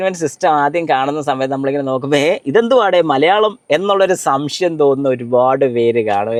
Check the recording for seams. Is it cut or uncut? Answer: uncut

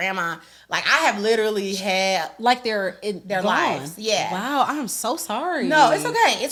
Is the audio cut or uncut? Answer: uncut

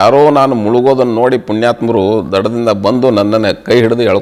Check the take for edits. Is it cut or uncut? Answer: uncut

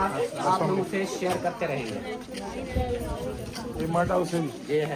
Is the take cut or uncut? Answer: uncut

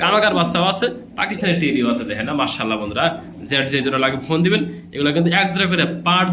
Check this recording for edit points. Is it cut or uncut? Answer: uncut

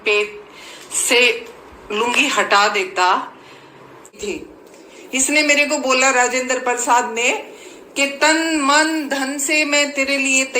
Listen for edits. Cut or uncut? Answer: cut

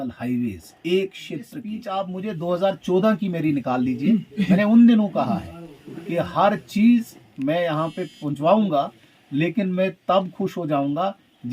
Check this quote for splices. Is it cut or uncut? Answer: cut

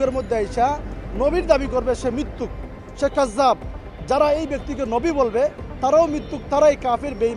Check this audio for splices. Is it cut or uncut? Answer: uncut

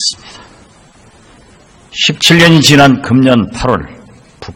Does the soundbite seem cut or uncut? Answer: uncut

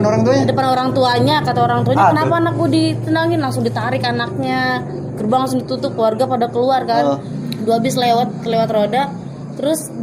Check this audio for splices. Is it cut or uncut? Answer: cut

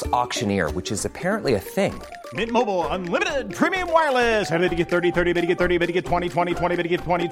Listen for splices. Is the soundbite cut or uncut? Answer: uncut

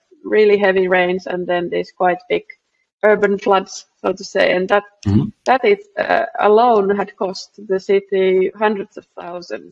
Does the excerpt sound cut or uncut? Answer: uncut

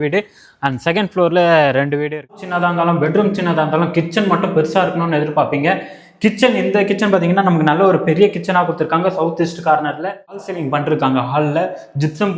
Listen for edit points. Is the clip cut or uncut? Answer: cut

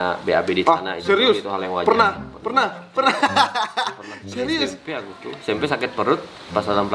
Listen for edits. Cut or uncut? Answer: uncut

